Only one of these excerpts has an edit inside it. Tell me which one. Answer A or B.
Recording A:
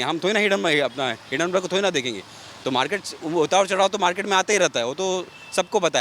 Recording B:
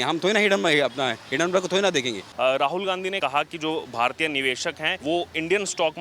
B